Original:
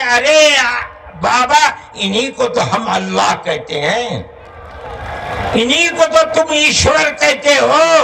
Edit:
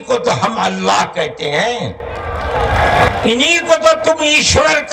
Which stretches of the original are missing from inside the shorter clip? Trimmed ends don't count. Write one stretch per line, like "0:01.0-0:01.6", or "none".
none